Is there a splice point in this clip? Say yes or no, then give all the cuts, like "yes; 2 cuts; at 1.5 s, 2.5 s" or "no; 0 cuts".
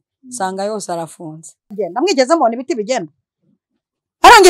yes; 1 cut; at 1.8 s